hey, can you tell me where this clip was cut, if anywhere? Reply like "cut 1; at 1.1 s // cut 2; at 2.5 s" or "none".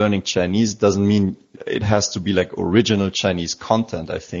cut 1; at 1.5 s